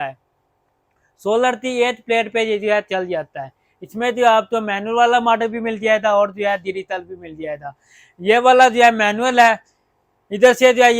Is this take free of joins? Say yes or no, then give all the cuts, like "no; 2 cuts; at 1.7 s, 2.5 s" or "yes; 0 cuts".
yes; 0 cuts